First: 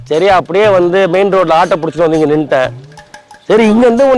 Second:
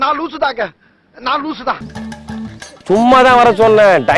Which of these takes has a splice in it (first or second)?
second